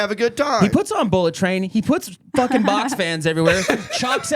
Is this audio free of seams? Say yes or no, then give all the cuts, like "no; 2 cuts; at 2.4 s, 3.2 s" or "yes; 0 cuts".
yes; 0 cuts